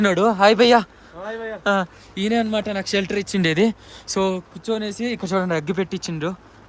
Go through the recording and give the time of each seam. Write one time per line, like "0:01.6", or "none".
none